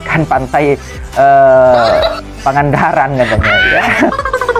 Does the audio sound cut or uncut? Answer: uncut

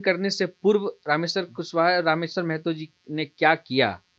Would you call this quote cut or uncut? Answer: uncut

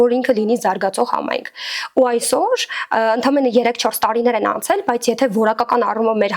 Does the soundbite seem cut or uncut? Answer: uncut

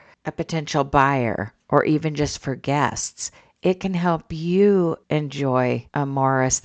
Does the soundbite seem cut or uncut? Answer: cut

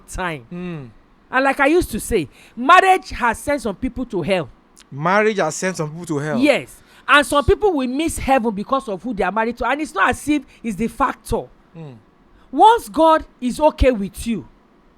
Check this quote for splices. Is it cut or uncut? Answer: uncut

